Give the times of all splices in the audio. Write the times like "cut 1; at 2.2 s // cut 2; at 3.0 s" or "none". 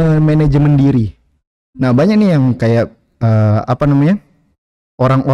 none